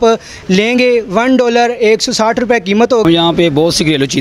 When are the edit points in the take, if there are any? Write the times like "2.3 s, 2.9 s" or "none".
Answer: 3.1 s